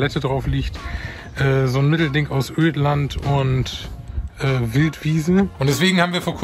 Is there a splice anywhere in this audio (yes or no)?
yes